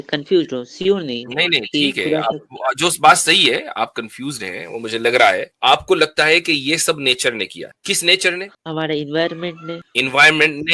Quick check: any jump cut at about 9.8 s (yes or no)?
yes